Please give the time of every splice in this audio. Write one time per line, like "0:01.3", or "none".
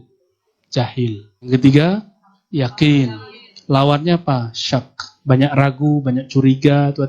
0:01.5